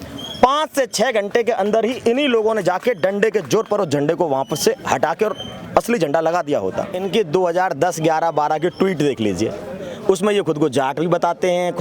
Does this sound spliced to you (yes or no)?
yes